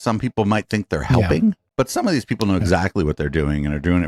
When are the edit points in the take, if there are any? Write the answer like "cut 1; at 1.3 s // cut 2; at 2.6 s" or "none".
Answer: none

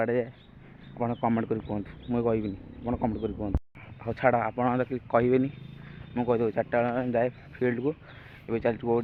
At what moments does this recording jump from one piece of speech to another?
none

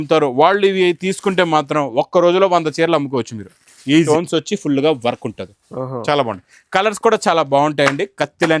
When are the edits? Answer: cut 1; at 4.1 s

